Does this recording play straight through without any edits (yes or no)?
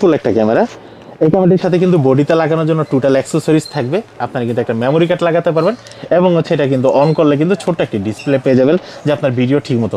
yes